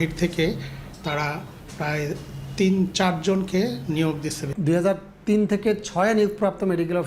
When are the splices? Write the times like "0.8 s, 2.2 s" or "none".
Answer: 4.4 s